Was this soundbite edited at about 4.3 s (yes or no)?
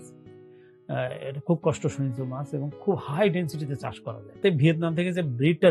yes